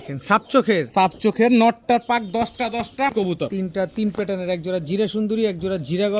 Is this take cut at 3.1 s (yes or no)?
yes